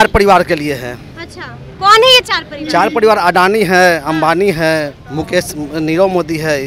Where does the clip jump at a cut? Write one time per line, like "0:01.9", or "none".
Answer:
none